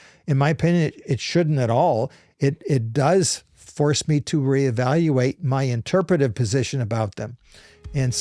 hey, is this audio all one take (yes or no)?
yes